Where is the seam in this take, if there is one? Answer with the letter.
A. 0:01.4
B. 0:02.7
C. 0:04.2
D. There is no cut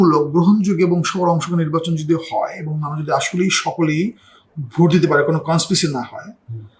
D